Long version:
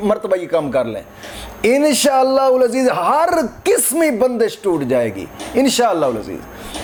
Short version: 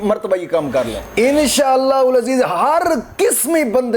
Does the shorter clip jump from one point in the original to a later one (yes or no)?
yes